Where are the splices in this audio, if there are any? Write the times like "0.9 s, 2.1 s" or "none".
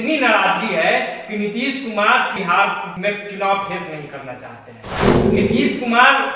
2.5 s